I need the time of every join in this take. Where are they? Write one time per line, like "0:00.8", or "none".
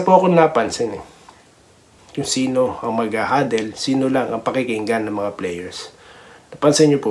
0:02.0